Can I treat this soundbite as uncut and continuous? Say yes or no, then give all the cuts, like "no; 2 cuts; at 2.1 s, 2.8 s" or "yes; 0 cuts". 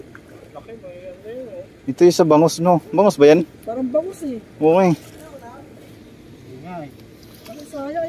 no; 1 cut; at 5.9 s